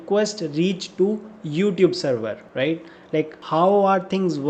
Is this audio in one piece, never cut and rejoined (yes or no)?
yes